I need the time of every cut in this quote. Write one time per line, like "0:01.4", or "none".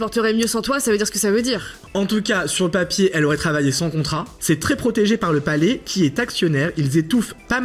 0:01.8
0:04.3